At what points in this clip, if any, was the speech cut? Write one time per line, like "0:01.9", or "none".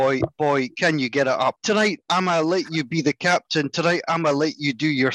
0:01.6